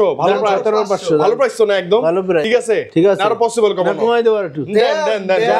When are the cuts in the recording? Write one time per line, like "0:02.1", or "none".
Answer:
0:02.4